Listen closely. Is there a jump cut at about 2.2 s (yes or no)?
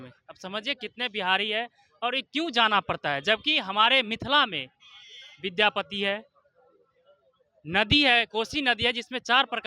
no